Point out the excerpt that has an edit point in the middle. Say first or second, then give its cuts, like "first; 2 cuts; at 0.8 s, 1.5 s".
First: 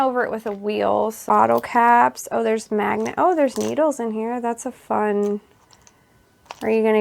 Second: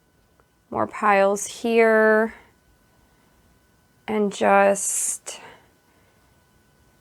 first; 1 cut; at 1.3 s